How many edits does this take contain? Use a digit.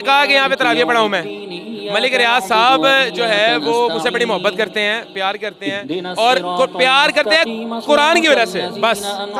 0